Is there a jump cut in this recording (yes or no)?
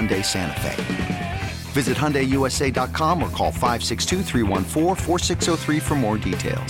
no